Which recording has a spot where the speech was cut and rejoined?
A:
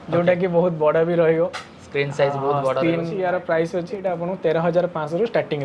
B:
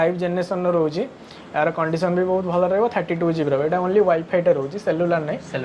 A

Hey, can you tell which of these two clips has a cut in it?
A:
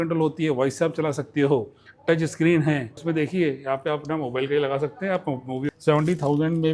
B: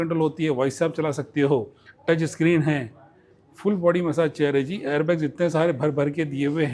A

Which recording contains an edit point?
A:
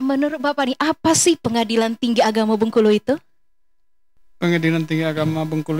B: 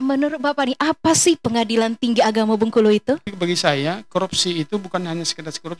B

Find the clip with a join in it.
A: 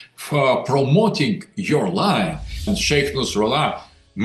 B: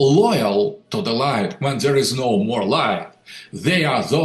A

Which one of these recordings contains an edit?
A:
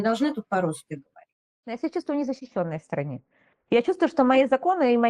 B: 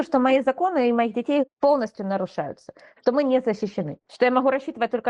A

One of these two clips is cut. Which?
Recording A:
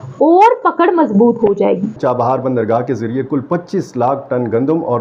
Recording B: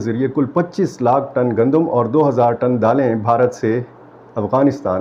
A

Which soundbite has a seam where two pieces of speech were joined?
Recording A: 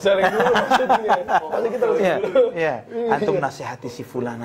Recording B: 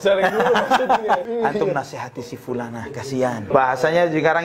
B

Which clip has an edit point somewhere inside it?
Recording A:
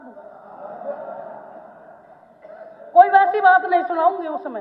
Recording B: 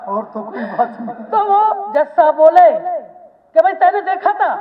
B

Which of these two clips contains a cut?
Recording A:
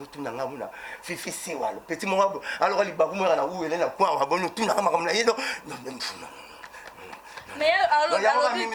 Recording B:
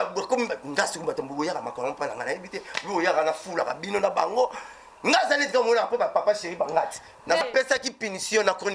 B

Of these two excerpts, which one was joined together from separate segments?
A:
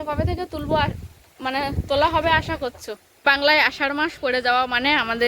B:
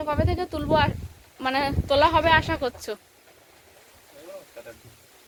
A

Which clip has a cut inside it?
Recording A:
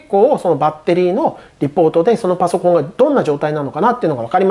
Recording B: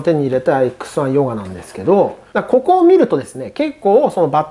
B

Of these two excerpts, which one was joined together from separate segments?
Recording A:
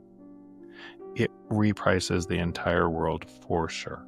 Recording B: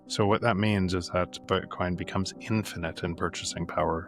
B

